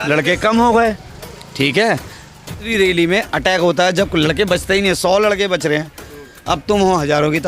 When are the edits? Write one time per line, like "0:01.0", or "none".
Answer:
0:02.7